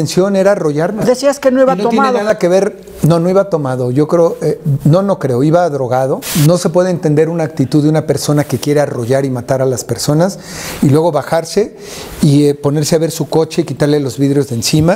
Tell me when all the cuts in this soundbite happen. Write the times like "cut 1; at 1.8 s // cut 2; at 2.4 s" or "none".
cut 1; at 1.0 s // cut 2; at 6.3 s